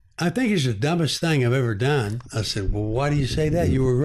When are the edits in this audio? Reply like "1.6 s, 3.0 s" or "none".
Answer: 2.3 s